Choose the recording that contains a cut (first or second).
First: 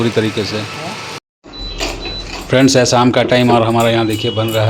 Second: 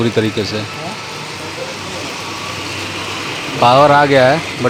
first